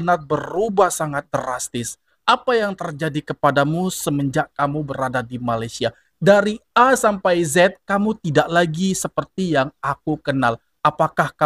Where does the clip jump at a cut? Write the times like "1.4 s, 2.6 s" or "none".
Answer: none